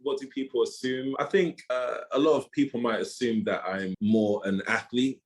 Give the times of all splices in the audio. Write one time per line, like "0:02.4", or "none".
0:01.1
0:03.9